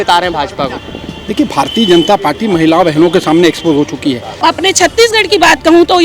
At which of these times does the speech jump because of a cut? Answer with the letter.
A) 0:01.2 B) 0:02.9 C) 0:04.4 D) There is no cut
C